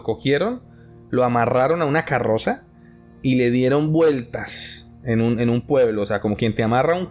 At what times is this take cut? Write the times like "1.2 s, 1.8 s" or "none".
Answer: none